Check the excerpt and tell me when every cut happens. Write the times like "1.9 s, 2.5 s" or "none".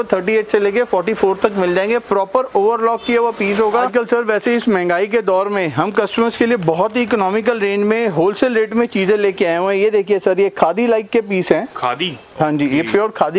3.9 s